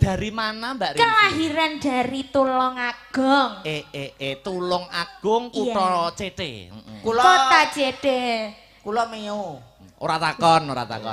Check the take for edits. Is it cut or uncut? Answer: uncut